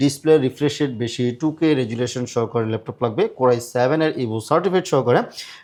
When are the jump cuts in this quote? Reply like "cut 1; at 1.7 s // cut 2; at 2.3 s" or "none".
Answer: none